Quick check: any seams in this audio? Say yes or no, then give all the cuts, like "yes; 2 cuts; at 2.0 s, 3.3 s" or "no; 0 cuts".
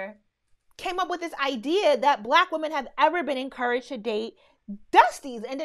no; 0 cuts